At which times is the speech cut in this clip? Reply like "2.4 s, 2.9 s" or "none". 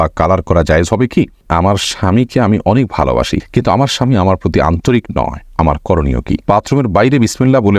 1.5 s, 6.5 s